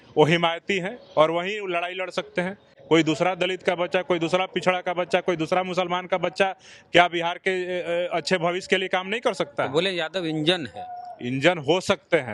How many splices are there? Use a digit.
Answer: 0